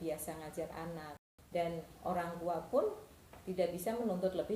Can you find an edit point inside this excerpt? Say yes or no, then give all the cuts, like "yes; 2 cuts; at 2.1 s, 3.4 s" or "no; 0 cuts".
yes; 1 cut; at 1.1 s